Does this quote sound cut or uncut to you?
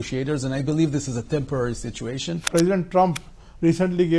cut